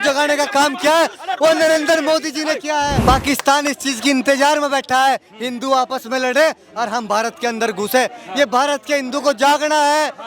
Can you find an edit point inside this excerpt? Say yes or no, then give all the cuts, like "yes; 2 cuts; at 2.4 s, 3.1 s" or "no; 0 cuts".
yes; 1 cut; at 3.0 s